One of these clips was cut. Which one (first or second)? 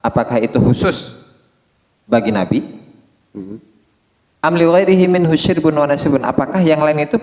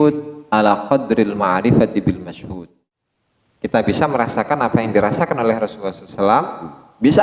second